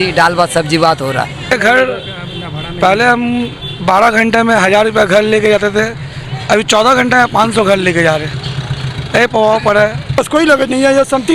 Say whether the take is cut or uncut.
cut